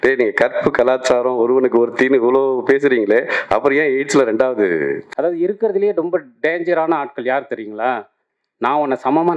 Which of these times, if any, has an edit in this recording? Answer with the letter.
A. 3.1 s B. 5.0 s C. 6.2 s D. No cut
B